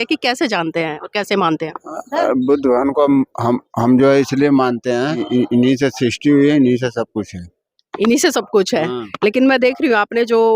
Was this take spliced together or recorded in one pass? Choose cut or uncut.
cut